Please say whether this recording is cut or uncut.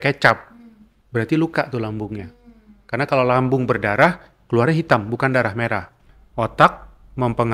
cut